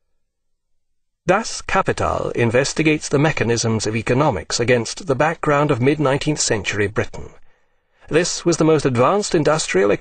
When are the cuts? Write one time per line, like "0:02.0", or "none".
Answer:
none